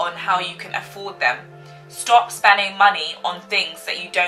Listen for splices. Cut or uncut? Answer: uncut